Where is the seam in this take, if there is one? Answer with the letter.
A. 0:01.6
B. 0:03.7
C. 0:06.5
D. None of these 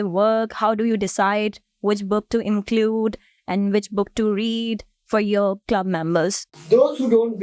C